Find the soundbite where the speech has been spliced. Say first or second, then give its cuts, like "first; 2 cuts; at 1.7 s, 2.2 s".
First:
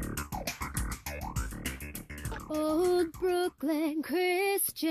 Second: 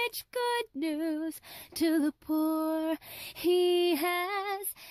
first; 1 cut; at 2.4 s